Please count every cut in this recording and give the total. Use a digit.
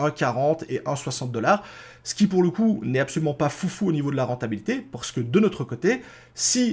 0